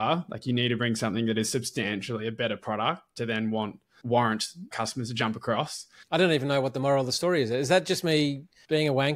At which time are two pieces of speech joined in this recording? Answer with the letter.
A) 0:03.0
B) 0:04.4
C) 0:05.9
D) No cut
C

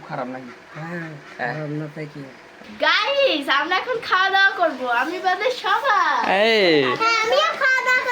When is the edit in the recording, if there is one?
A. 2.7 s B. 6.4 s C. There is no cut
A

